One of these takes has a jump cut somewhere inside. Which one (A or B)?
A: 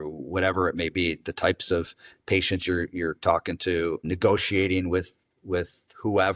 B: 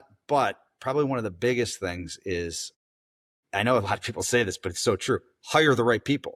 A